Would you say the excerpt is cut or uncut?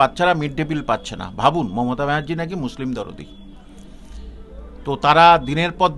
uncut